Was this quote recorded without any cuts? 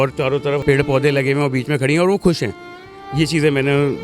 yes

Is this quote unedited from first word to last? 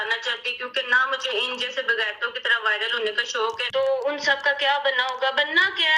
no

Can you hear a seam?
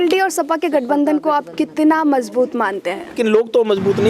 yes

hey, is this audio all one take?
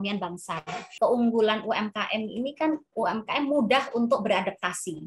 no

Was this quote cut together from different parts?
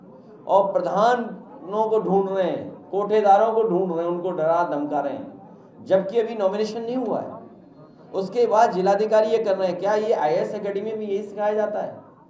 no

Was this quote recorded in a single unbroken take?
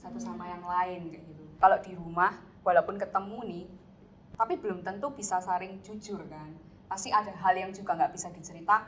yes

